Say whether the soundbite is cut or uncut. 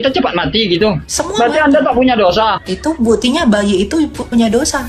cut